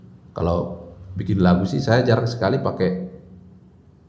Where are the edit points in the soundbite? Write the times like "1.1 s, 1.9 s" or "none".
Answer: none